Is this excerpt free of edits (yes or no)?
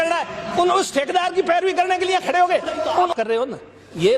no